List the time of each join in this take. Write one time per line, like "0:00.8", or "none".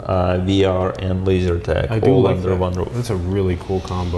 none